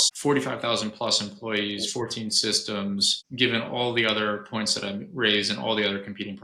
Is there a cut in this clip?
no; 0 cuts

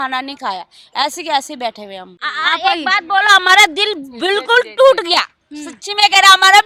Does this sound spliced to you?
no; 0 cuts

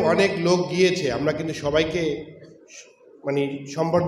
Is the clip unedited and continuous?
yes; 0 cuts

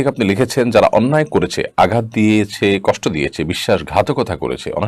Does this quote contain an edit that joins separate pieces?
no; 0 cuts

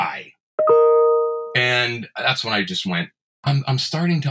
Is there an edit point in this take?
yes; 1 cut; at 3.2 s

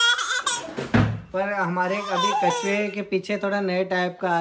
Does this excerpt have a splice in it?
no; 0 cuts

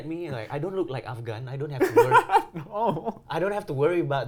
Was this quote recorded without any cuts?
yes; 0 cuts

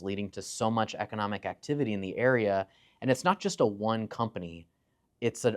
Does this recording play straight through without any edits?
yes; 0 cuts

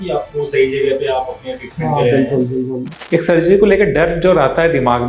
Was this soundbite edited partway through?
yes; 1 cut; at 2.9 s

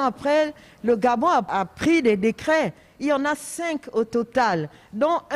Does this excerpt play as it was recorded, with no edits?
no; 1 cut; at 1.5 s

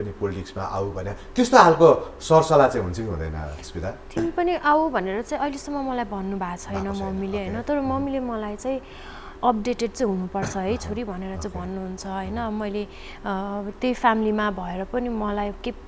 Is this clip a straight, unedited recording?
yes; 0 cuts

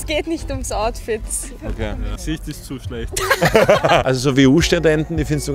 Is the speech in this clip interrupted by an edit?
yes; 1 cut; at 4.0 s

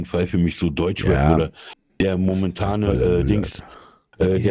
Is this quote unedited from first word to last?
yes; 0 cuts

